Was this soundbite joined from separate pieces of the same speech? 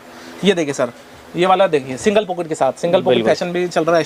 no; 0 cuts

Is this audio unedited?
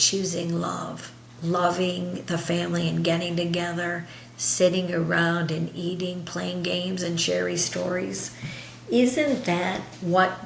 yes; 0 cuts

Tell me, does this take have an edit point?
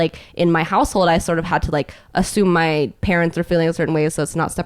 no; 0 cuts

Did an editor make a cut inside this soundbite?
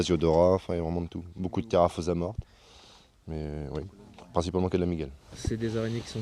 yes; 1 cut; at 3.5 s

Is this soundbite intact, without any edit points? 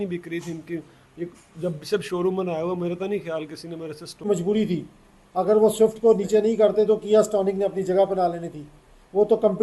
no; 1 cut; at 4.3 s

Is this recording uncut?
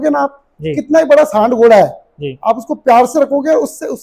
yes; 0 cuts

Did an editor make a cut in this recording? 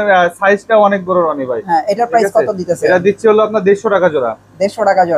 no; 0 cuts

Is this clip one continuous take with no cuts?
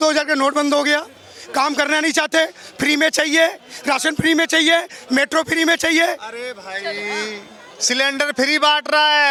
yes; 0 cuts

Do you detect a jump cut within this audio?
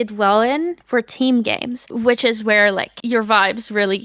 no; 0 cuts

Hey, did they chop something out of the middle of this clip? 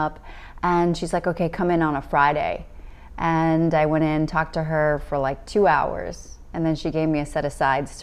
no; 0 cuts

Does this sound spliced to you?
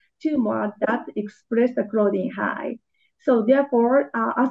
no; 0 cuts

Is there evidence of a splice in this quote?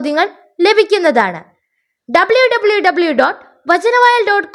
no; 0 cuts

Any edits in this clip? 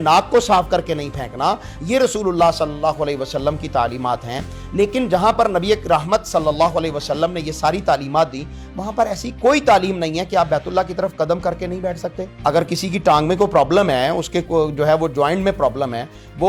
no; 0 cuts

